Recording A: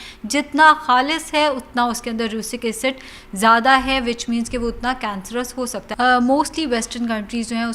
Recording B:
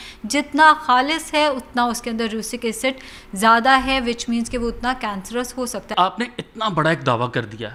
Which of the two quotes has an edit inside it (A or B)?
A